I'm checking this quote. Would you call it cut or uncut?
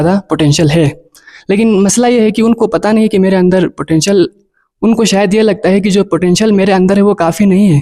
uncut